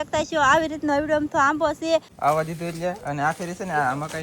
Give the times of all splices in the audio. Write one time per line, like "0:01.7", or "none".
0:02.1